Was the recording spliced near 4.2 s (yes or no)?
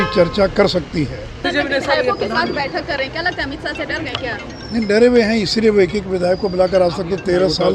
no